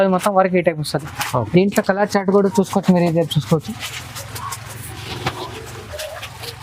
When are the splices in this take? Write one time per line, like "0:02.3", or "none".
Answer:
none